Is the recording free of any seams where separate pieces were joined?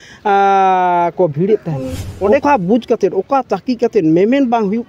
no; 1 cut; at 2.4 s

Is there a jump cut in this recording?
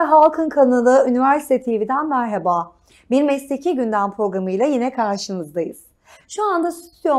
no; 0 cuts

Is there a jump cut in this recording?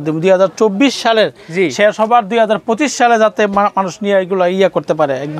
no; 0 cuts

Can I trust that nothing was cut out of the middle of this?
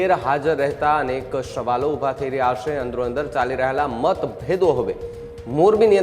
yes; 0 cuts

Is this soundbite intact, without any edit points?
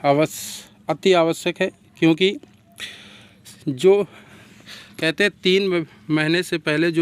yes; 0 cuts

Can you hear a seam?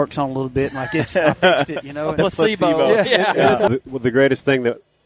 yes; 1 cut; at 3.7 s

